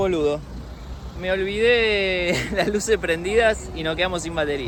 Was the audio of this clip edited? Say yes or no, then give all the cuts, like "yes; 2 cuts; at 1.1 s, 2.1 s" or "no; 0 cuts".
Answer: no; 0 cuts